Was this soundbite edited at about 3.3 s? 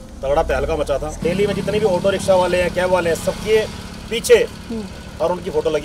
no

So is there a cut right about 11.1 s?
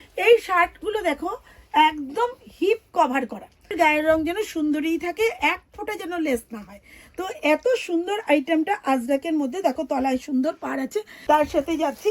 yes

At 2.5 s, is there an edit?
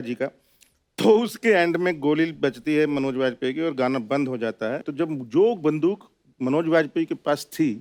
no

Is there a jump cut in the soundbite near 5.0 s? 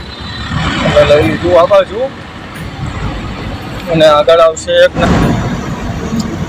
yes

